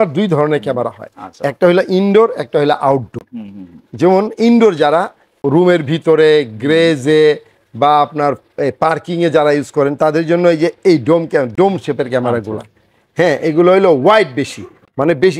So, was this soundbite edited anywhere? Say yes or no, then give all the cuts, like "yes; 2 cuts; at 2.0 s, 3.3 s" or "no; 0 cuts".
no; 0 cuts